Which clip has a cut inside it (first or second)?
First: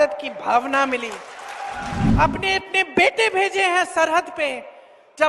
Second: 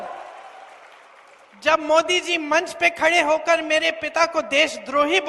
first